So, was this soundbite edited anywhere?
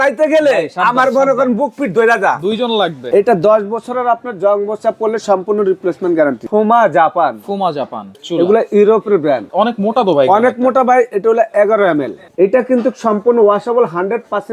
yes; 5 cuts; at 3.0 s, 6.4 s, 8.1 s, 9.5 s, 12.2 s

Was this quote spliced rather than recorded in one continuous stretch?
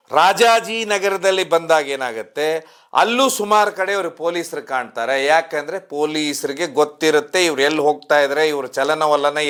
no; 0 cuts

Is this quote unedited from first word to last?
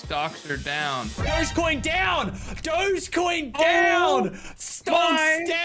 yes; 0 cuts

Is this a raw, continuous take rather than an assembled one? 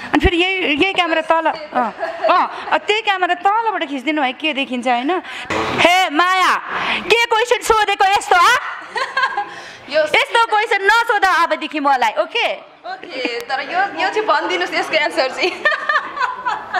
no; 1 cut; at 5.4 s

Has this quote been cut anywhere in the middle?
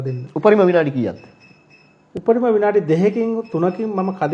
no; 0 cuts

